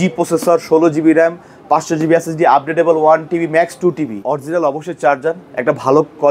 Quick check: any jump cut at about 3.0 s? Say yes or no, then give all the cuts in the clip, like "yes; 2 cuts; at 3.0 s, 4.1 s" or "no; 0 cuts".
no; 1 cut; at 4.2 s